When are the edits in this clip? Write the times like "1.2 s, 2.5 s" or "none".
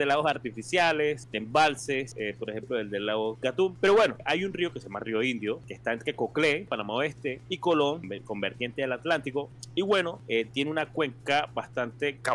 1.3 s, 2.1 s, 3.5 s, 4.2 s, 5.7 s, 7.0 s, 8.1 s, 9.6 s, 10.2 s